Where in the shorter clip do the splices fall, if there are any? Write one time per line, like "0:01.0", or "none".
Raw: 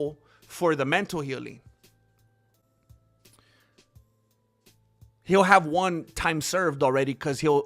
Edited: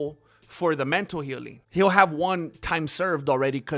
0:01.5

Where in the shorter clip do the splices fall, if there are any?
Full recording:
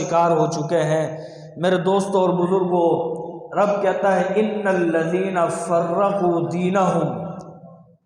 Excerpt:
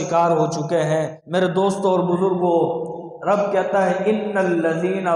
0:01.2

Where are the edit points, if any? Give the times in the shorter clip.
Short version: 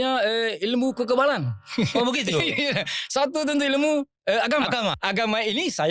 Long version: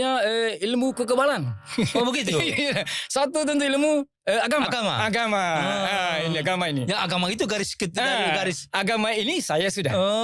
0:05.0

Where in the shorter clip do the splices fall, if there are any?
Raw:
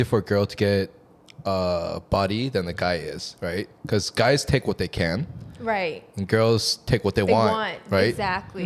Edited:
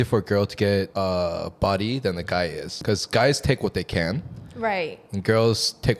0:00.9
0:02.7

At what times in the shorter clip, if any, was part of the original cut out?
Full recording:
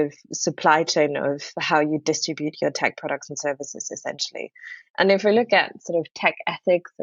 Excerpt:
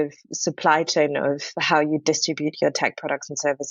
none

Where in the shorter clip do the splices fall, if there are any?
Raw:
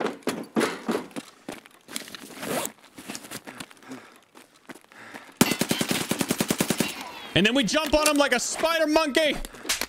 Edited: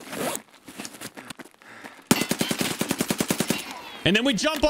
0:01.4

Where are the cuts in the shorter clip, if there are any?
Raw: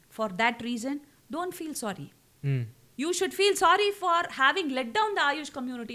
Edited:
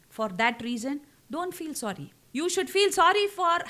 0:02.1

